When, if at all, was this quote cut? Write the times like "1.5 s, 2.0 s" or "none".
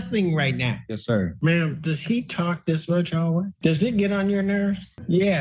1.3 s, 3.5 s